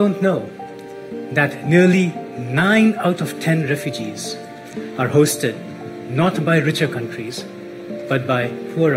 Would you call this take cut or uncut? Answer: uncut